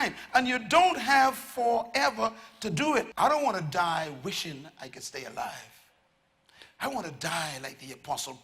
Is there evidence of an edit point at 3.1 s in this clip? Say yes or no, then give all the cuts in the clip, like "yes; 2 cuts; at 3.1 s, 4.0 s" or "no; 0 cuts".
yes; 1 cut; at 3.1 s